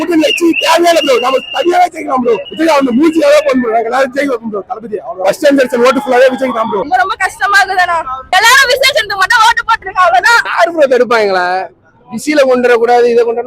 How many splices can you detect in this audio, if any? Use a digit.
4